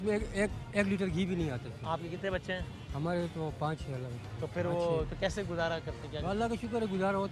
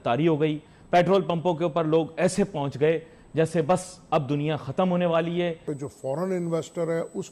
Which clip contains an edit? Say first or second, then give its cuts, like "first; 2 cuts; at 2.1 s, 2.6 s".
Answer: second; 1 cut; at 5.6 s